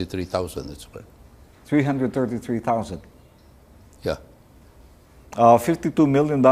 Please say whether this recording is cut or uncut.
uncut